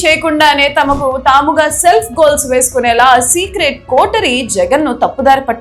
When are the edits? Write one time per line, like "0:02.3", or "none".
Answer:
none